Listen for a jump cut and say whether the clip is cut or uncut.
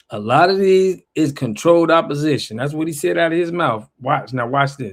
uncut